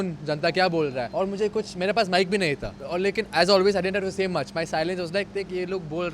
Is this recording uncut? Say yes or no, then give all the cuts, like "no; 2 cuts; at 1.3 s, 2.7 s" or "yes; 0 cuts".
no; 2 cuts; at 1.0 s, 2.7 s